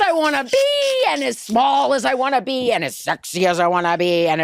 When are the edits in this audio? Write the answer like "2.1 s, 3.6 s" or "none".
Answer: none